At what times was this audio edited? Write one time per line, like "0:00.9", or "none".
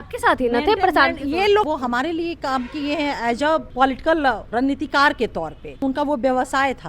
0:01.7
0:03.7
0:04.5
0:05.8